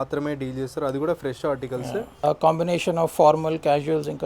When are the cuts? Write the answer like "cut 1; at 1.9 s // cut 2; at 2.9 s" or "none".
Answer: cut 1; at 2.2 s